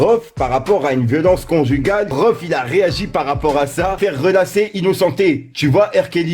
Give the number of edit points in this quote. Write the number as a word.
two